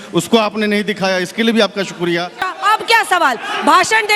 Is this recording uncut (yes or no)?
no